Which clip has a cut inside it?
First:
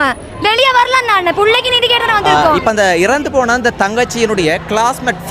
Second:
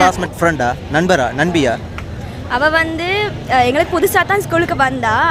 first; 1 cut; at 2.3 s

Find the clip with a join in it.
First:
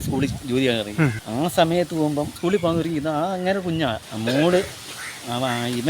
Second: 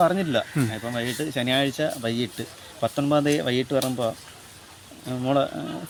first; 3 cuts; at 1.2 s, 2.3 s, 4.0 s

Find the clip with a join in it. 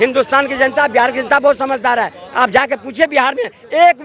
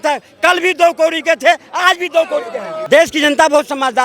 second; 1 cut; at 2.7 s

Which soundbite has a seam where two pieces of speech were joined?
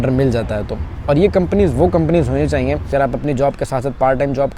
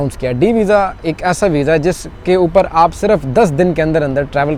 first; 1 cut; at 2.9 s

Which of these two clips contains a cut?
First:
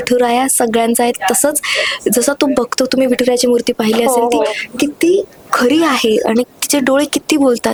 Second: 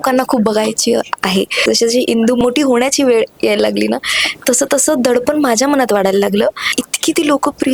second; 3 cuts; at 1.5 s, 2.4 s, 6.8 s

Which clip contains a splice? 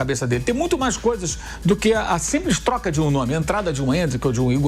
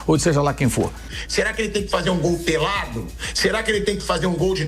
second; 1 cut; at 1.0 s

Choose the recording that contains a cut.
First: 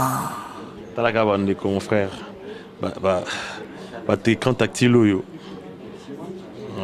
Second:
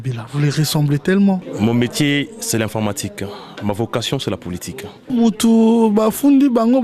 second; 2 cuts; at 1.5 s, 5.1 s

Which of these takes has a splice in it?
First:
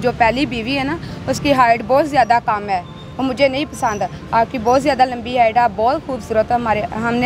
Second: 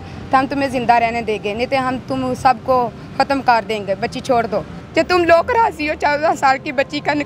second; 1 cut; at 4.8 s

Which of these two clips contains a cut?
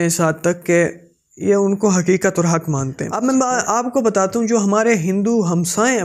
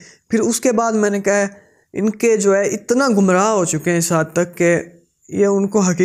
first; 1 cut; at 3.1 s

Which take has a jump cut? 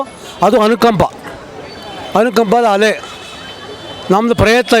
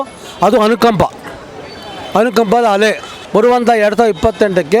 second; 1 cut; at 3.1 s

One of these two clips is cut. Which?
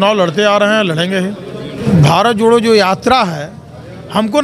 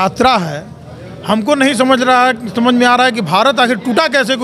first; 1 cut; at 1.7 s

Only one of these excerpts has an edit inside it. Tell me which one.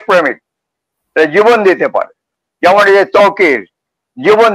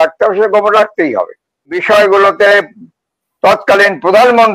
second; 1 cut; at 1.7 s

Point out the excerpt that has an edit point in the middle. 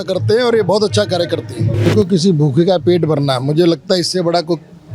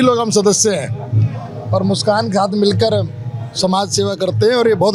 first; 1 cut; at 1.8 s

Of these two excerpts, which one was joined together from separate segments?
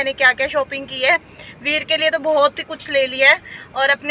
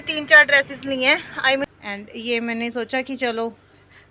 second; 1 cut; at 1.7 s

